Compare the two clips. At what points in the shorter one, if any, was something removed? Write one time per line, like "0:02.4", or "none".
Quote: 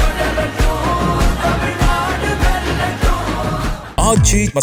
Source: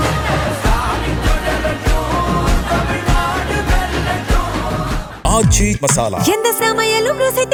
none